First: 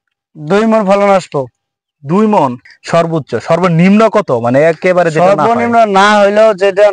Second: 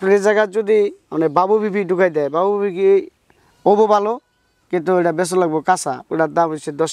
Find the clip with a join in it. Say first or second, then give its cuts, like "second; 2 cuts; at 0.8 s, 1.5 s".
first; 1 cut; at 2.7 s